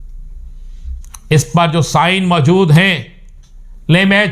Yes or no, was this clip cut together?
no